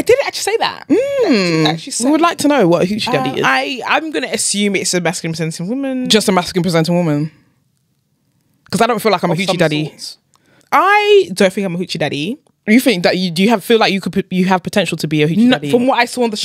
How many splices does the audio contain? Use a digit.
0